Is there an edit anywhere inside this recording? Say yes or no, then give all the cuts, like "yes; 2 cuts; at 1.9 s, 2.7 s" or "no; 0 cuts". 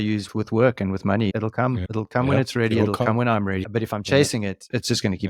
yes; 2 cuts; at 1.9 s, 3.6 s